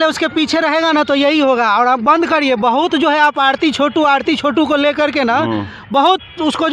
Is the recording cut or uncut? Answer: uncut